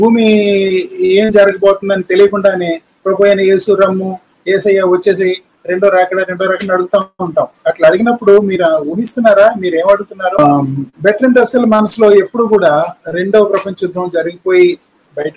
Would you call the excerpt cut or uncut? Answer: cut